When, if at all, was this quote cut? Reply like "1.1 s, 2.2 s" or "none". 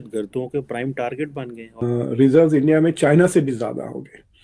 1.8 s